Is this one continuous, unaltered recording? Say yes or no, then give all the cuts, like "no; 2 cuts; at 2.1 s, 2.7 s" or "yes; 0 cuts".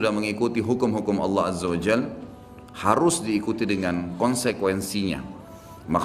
yes; 0 cuts